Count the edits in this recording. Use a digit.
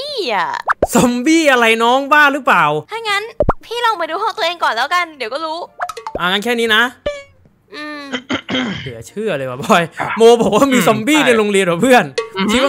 1